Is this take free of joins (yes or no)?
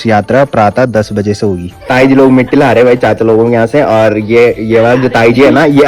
no